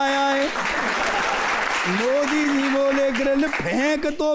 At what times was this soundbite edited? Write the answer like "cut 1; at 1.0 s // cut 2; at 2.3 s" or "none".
cut 1; at 1.7 s